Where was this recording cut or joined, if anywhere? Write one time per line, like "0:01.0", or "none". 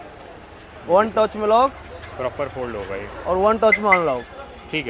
none